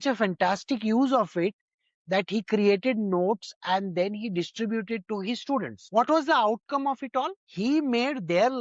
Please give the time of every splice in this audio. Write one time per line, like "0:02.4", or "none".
none